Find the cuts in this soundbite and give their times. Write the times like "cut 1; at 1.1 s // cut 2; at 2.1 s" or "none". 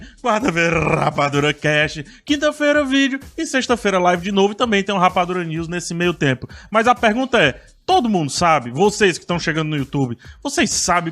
cut 1; at 3.2 s